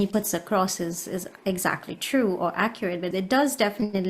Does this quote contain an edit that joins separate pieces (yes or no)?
yes